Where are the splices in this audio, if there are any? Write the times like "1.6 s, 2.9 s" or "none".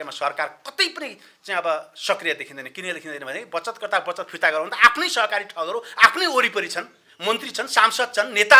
none